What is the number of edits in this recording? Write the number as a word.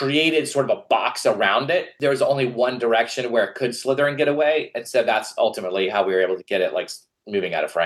zero